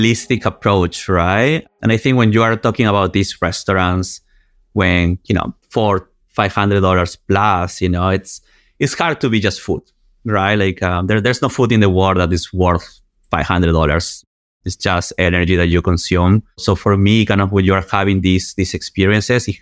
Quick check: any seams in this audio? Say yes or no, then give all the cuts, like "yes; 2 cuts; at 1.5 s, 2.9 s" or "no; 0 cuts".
yes; 3 cuts; at 1.7 s, 5.6 s, 16.6 s